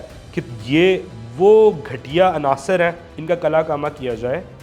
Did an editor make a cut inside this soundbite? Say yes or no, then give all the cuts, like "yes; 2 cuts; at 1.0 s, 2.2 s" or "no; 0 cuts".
yes; 1 cut; at 3.1 s